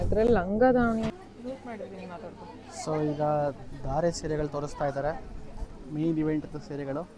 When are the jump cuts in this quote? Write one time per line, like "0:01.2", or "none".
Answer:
0:01.1